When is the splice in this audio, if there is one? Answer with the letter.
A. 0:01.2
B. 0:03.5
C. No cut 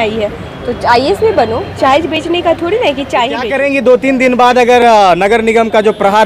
B